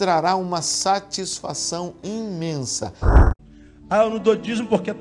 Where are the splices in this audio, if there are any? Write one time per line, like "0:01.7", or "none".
0:03.2